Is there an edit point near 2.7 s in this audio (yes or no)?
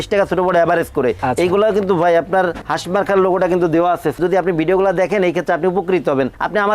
yes